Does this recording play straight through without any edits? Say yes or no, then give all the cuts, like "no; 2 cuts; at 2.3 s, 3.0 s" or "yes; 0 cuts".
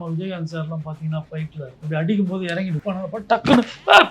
no; 2 cuts; at 1.7 s, 2.8 s